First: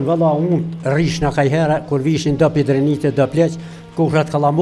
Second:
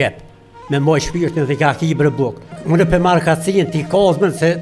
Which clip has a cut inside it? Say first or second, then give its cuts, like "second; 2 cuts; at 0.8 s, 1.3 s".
second; 1 cut; at 2.5 s